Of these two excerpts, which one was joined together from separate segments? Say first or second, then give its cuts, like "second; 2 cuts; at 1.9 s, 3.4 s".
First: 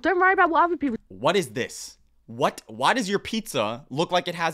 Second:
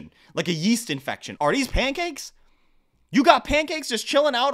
second; 1 cut; at 1.3 s